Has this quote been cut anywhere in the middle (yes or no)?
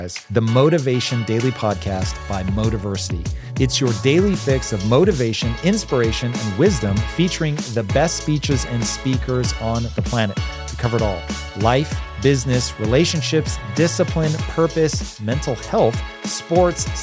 no